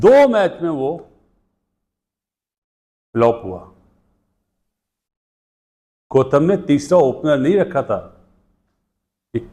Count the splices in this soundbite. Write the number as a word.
zero